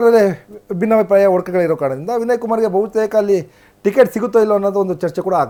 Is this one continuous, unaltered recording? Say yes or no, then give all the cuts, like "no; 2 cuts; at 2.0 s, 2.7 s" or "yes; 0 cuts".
yes; 0 cuts